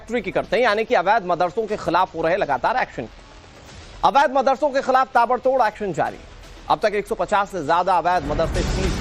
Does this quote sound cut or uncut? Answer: cut